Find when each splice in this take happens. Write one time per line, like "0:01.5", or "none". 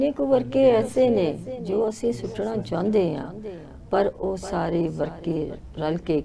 none